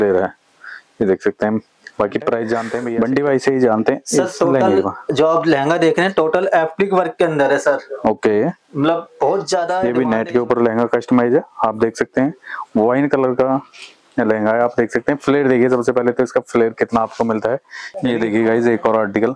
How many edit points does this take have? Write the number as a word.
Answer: three